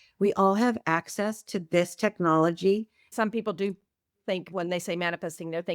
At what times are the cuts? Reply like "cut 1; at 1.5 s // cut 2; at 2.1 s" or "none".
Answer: cut 1; at 3.0 s